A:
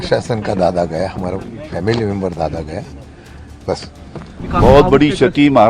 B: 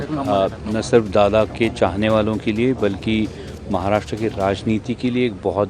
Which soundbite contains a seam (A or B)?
A